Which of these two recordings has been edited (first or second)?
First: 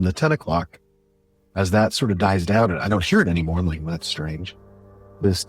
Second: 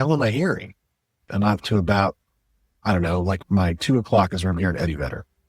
second